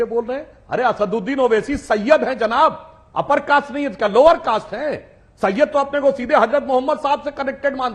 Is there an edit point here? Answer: no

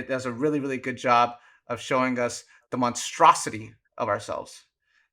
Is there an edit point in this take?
no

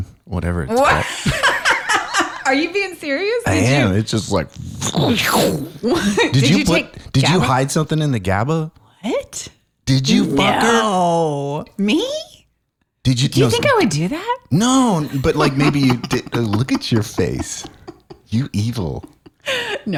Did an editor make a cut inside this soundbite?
no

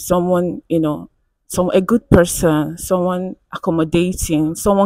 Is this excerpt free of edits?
yes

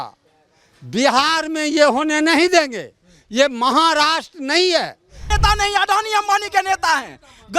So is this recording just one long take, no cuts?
no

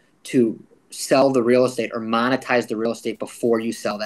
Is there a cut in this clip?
no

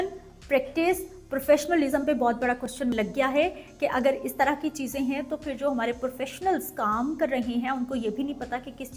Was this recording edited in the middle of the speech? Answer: no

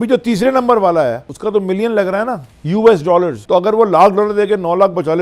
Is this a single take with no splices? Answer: no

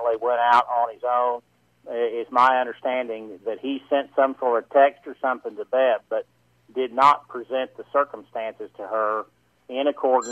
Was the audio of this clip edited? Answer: no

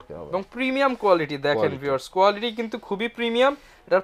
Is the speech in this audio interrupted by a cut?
no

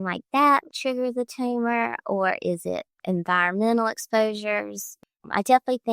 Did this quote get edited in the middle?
yes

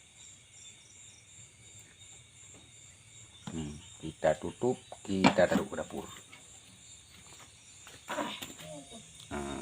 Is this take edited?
yes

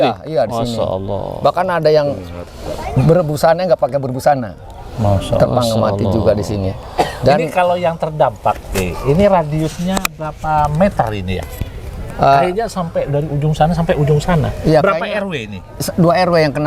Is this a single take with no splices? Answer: yes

